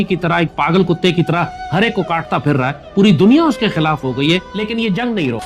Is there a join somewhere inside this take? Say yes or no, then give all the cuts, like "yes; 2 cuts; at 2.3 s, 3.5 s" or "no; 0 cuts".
yes; 1 cut; at 4.5 s